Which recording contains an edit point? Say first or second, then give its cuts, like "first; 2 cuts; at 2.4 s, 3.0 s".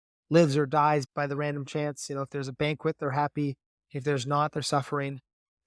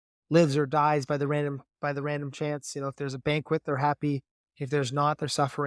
first; 1 cut; at 1.1 s